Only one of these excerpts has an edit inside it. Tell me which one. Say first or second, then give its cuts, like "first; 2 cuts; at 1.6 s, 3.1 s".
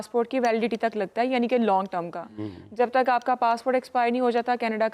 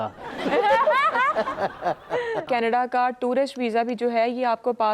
second; 1 cut; at 2.4 s